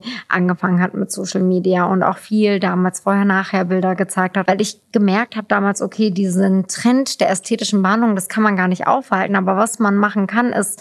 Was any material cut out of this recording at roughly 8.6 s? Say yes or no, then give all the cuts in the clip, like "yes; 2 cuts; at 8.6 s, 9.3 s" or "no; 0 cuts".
no; 1 cut; at 4.4 s